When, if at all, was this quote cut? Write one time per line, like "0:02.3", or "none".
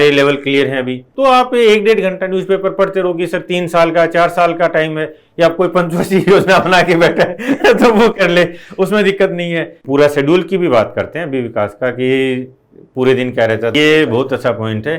0:01.1
0:09.7
0:13.7